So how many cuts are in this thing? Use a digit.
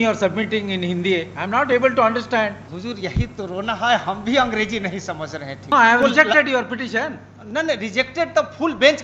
2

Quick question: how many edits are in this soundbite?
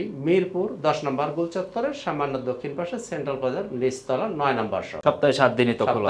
1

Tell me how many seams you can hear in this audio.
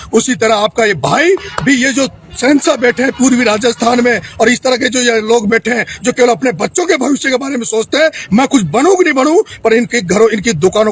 0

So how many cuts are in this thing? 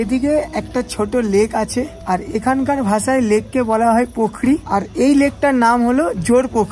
2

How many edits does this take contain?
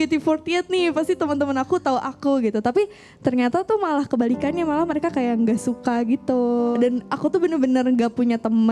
1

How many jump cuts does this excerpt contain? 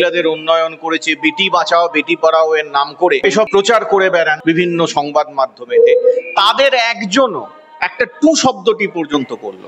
2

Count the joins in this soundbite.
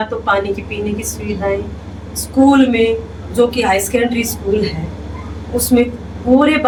0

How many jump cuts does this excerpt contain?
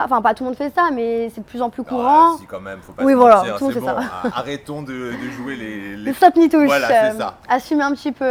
0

